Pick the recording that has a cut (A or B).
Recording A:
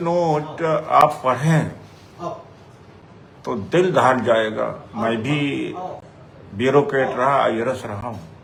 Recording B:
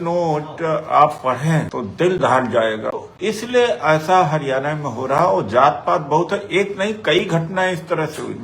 B